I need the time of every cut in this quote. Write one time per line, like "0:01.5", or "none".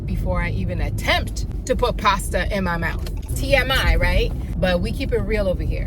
0:03.2
0:04.4